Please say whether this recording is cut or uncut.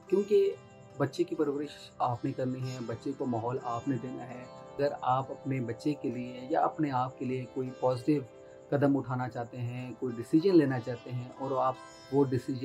cut